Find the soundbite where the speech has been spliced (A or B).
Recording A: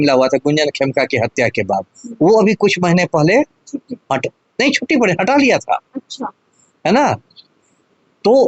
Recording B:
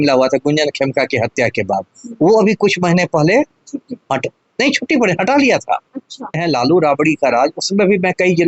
B